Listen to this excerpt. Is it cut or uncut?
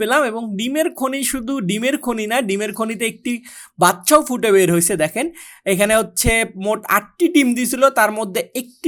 uncut